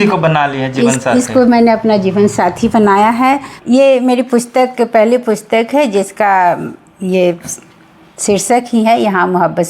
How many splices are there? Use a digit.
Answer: 1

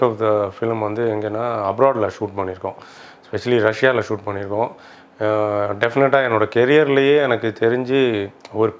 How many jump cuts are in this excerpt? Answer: 0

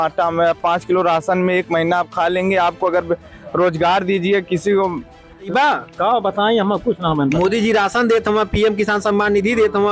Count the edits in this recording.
1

